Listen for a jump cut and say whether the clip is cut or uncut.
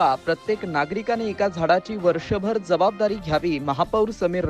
uncut